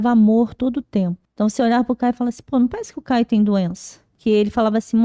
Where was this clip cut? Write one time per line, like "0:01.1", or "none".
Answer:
0:01.2
0:04.1